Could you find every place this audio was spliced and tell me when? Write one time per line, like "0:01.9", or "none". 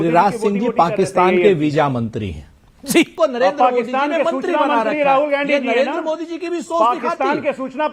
0:03.1
0:06.4